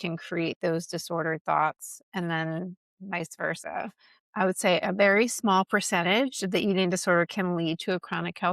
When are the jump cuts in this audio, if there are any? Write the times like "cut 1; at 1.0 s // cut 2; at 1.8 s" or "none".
cut 1; at 2.0 s // cut 2; at 4.2 s